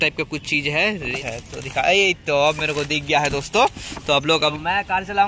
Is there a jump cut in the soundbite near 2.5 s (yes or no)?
no